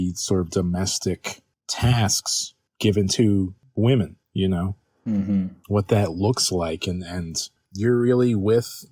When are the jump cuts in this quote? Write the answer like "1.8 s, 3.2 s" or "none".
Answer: 3.9 s, 7.6 s

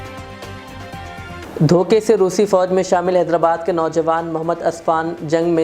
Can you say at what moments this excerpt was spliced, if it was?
1.4 s

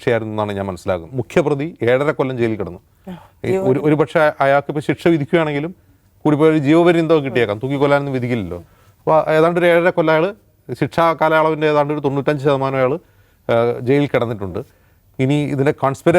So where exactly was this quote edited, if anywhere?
1.1 s

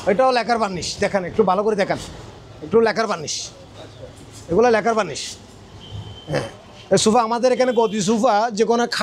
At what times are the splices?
none

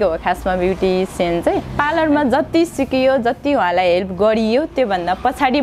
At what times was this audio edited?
1.7 s

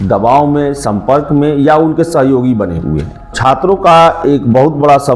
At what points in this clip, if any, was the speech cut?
3.3 s

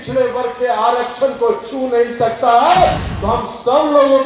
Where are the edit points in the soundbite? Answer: 3.0 s

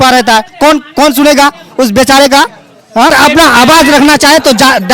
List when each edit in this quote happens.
3.1 s

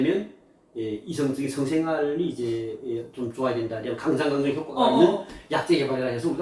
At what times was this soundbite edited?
none

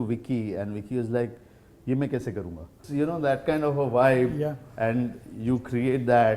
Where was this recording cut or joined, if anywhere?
2.8 s

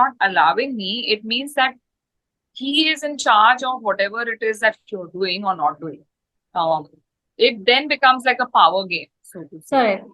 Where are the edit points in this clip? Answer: none

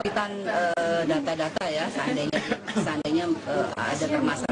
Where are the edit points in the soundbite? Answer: none

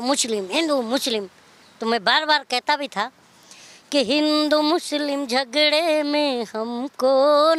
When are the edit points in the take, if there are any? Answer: none

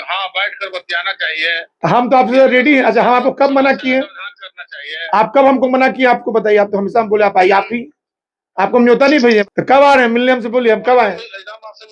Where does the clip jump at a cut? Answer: 9.4 s

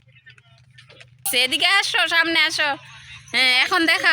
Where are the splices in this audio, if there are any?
1.3 s

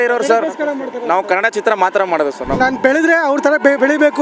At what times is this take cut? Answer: 2.6 s

